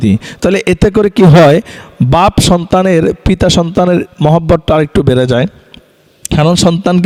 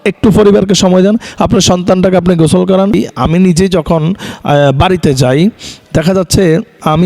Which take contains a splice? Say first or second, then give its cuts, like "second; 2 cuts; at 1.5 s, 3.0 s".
second; 1 cut; at 2.9 s